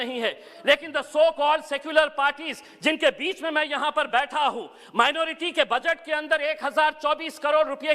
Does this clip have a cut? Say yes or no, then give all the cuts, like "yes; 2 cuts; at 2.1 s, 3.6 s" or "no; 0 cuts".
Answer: no; 0 cuts